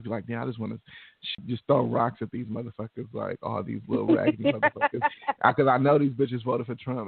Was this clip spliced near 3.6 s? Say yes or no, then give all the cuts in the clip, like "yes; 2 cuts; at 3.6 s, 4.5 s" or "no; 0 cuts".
no; 1 cut; at 1.3 s